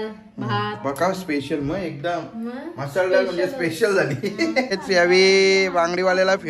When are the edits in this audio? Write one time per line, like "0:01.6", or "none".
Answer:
0:04.8